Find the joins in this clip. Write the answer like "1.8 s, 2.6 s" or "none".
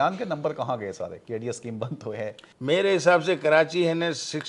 2.5 s